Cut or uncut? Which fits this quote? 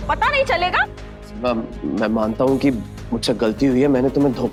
uncut